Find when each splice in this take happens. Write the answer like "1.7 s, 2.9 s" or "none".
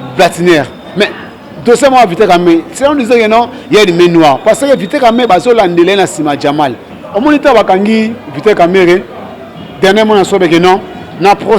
6.9 s